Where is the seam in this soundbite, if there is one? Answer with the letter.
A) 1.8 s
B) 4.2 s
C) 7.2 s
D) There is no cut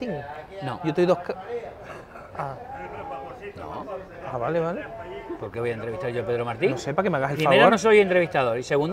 D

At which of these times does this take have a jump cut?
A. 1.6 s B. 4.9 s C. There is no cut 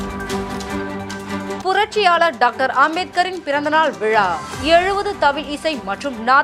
C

